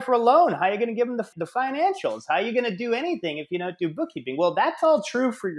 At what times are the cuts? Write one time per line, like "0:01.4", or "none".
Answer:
0:01.3